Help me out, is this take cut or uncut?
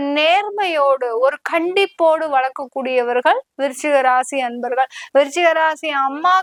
uncut